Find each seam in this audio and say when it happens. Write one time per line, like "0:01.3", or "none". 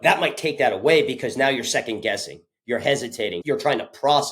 0:03.4